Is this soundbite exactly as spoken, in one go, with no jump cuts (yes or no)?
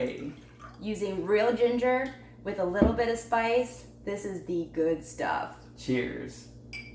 yes